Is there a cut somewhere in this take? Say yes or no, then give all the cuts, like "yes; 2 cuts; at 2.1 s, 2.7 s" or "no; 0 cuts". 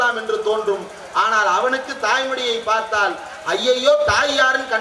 no; 0 cuts